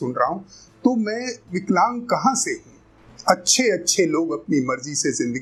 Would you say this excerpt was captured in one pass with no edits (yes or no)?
yes